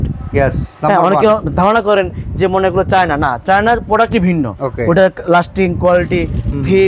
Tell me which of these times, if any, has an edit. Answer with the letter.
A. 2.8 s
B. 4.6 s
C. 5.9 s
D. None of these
B